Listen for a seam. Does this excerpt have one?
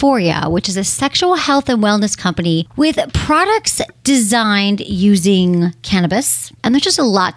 yes; 3 cuts; at 2.7 s, 3.9 s, 6.5 s

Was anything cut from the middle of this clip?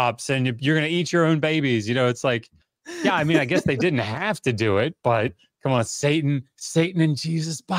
yes; 1 cut; at 5.5 s

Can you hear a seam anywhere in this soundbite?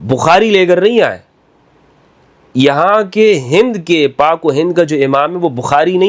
no; 0 cuts

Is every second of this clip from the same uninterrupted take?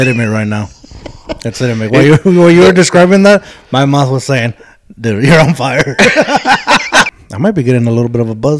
no; 1 cut; at 7.2 s

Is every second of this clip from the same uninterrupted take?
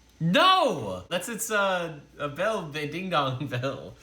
no; 1 cut; at 1.1 s

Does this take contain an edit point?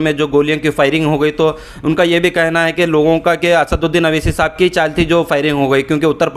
no; 0 cuts

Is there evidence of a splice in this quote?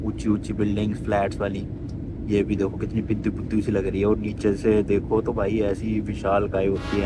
no; 0 cuts

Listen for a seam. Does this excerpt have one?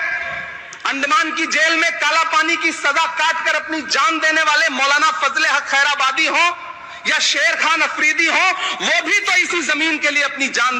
no; 0 cuts

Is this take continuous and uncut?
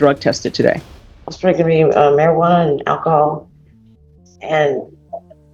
yes; 0 cuts

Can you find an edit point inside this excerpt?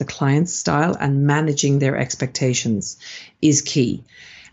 no; 0 cuts

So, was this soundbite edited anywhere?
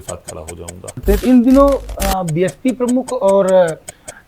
yes; 1 cut; at 1.0 s

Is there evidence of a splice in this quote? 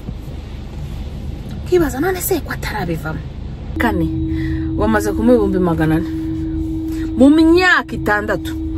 yes; 1 cut; at 3.7 s

